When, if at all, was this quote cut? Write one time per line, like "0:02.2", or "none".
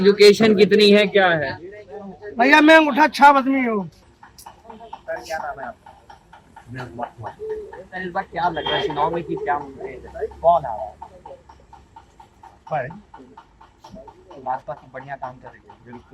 none